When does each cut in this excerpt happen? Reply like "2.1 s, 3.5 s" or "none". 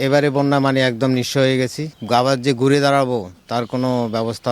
1.9 s